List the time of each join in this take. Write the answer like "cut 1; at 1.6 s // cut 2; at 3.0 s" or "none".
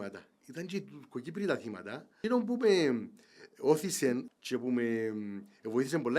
cut 1; at 2.2 s // cut 2; at 4.3 s